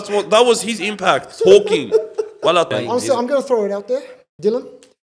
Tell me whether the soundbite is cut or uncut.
cut